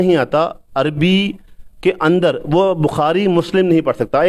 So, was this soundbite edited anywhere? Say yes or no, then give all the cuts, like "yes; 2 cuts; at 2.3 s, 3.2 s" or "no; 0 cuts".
no; 0 cuts